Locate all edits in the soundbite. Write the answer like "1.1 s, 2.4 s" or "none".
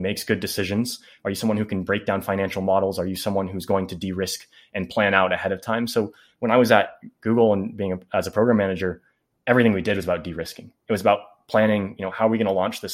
none